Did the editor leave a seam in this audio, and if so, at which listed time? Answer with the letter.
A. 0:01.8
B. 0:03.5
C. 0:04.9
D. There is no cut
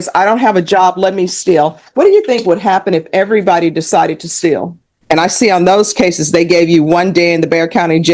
C